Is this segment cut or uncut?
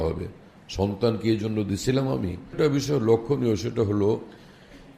cut